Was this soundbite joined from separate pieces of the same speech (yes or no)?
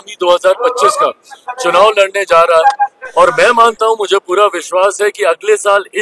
no